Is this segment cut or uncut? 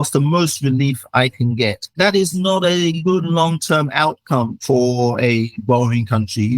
cut